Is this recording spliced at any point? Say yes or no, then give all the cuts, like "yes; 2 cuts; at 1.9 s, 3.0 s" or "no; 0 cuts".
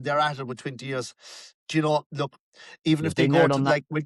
no; 0 cuts